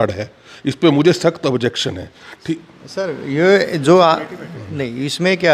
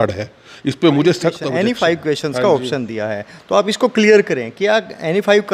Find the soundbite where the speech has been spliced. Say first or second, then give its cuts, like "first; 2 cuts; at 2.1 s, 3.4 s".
second; 1 cut; at 1.4 s